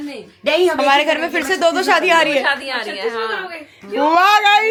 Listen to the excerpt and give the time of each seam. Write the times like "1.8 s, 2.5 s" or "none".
none